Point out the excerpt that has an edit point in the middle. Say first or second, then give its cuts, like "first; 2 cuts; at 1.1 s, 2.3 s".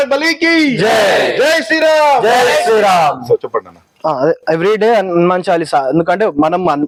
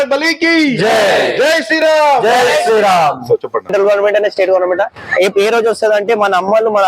second; 1 cut; at 3.7 s